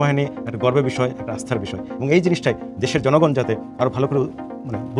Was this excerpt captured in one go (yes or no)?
yes